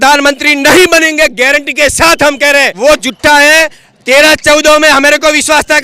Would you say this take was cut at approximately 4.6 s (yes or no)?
no